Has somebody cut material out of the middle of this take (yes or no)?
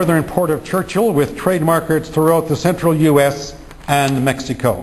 no